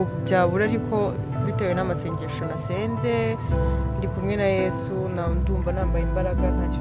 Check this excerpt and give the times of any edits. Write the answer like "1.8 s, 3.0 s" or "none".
none